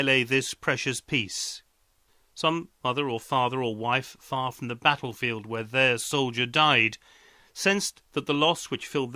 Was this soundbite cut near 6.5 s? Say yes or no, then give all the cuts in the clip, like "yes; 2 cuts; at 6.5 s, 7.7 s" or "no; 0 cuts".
no; 1 cut; at 1.2 s